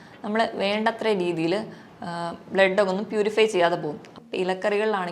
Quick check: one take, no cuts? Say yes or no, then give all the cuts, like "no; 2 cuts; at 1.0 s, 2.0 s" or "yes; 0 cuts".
no; 1 cut; at 4.1 s